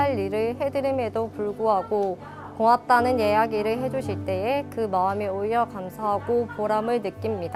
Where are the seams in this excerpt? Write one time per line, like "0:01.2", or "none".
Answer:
none